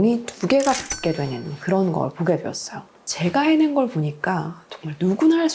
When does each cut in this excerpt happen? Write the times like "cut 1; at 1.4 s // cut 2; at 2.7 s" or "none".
cut 1; at 3.1 s

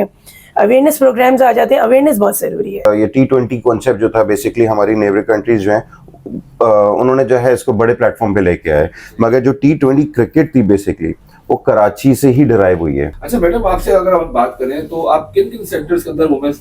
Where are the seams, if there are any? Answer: cut 1; at 2.8 s // cut 2; at 13.2 s

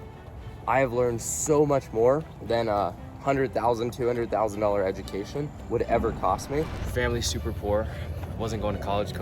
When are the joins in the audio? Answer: cut 1; at 2.3 s // cut 2; at 6.8 s

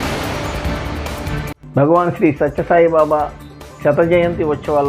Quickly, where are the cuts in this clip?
cut 1; at 1.4 s

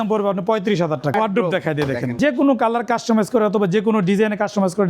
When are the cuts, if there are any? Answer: cut 1; at 1.1 s // cut 2; at 2.2 s

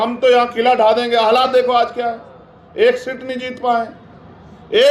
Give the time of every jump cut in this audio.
none

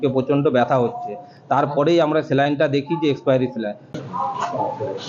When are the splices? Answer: cut 1; at 3.9 s

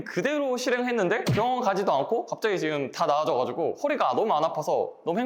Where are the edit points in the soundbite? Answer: none

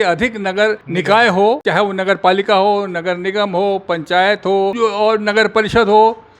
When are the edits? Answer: cut 1; at 0.9 s // cut 2; at 1.6 s // cut 3; at 4.8 s

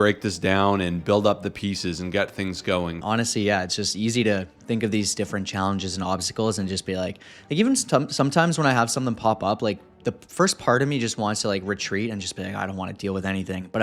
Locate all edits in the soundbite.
cut 1; at 3.0 s

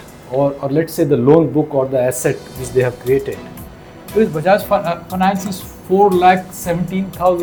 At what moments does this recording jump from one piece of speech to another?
none

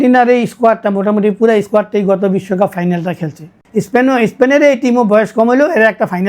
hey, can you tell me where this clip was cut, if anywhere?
cut 1; at 3.6 s

